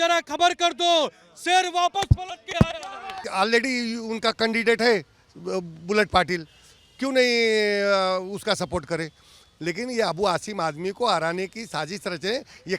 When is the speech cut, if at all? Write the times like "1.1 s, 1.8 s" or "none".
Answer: 3.2 s